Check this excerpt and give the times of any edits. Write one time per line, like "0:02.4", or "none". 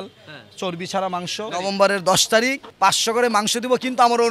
0:01.5
0:02.6